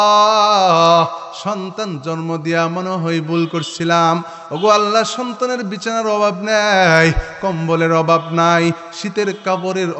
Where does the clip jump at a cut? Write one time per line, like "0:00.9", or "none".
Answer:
none